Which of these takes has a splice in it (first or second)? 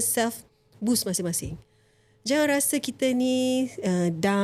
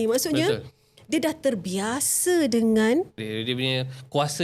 second